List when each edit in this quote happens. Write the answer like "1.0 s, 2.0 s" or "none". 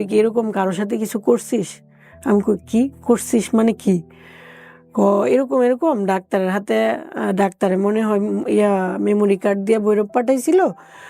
none